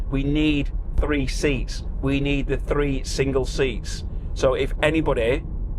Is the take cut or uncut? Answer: uncut